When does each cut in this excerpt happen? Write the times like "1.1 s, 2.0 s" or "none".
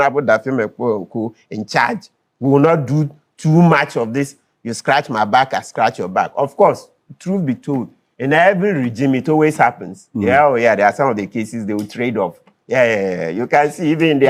none